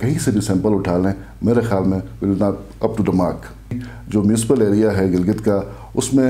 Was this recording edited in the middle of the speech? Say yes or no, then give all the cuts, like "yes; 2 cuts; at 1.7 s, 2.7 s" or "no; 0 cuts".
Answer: yes; 1 cut; at 3.9 s